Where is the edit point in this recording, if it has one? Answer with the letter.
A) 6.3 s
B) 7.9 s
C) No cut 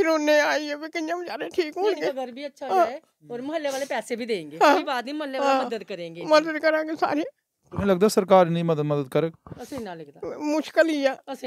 C